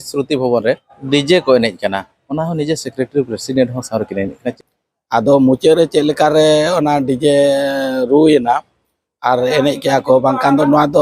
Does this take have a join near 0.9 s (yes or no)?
yes